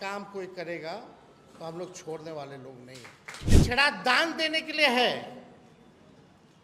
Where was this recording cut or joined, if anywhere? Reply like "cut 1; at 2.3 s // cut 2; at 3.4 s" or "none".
cut 1; at 3.5 s

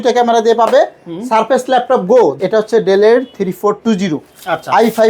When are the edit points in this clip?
cut 1; at 2.4 s

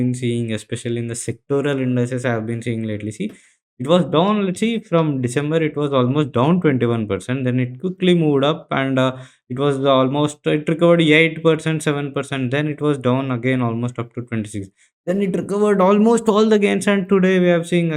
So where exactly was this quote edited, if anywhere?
none

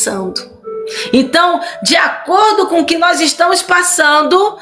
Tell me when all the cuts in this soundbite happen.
none

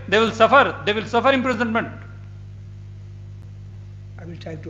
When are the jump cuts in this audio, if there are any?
none

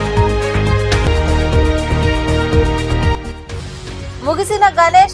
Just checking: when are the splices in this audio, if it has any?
cut 1; at 1.0 s

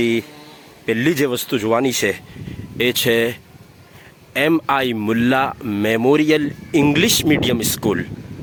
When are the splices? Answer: none

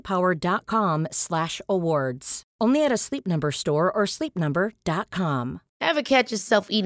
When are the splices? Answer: cut 1; at 5.6 s

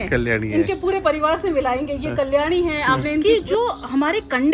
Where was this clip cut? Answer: cut 1; at 3.2 s

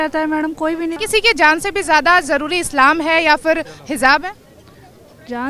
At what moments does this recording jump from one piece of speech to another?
cut 1; at 1.0 s

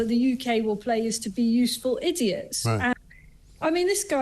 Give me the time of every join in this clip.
cut 1; at 2.9 s

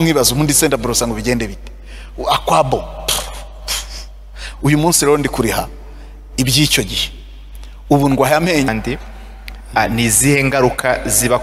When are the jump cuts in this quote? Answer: cut 1; at 8.7 s

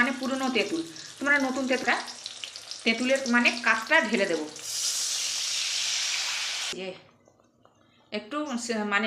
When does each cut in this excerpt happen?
cut 1; at 1.8 s // cut 2; at 6.7 s

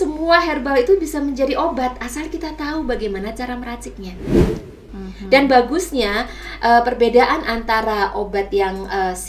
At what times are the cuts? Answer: cut 1; at 4.5 s

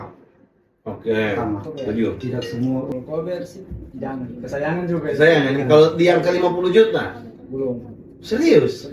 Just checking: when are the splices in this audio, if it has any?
cut 1; at 2.9 s

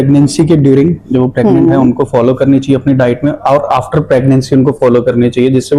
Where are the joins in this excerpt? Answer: none

